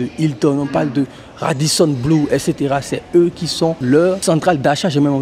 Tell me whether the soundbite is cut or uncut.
cut